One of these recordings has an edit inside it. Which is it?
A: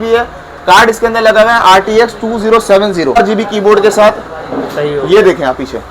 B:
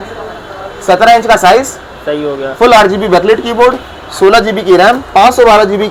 A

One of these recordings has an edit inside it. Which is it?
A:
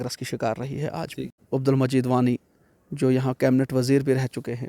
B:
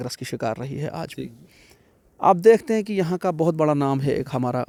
A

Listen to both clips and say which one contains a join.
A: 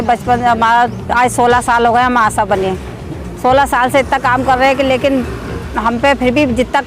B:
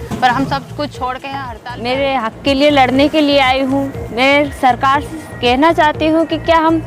B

